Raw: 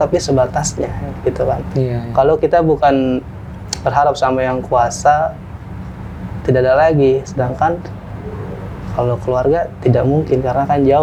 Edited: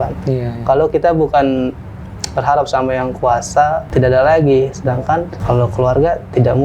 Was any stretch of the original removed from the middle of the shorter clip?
yes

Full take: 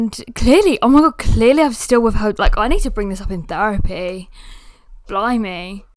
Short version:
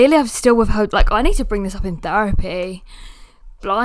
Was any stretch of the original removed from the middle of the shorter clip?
no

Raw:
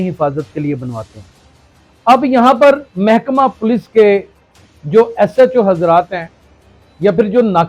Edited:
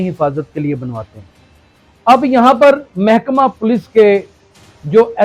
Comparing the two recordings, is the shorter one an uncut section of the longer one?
yes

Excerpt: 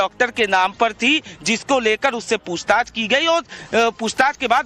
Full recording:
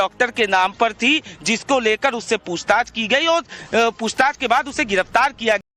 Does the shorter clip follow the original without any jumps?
yes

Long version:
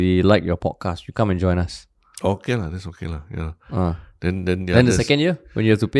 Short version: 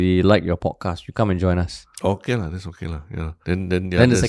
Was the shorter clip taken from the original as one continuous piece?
no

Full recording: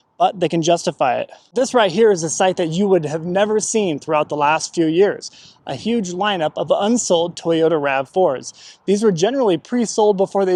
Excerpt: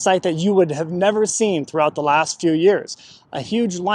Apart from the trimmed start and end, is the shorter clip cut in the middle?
no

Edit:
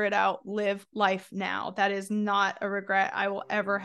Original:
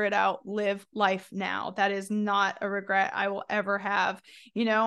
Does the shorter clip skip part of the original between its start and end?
no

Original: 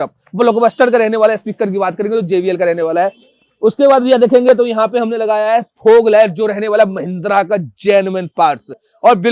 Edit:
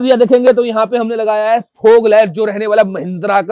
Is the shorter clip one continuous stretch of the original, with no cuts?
yes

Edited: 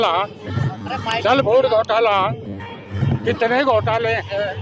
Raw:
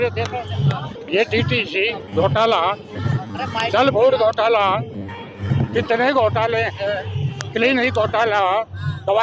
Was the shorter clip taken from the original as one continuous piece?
yes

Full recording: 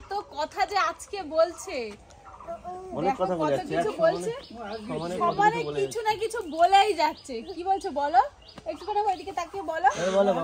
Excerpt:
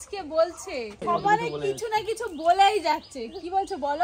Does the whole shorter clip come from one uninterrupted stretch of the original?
no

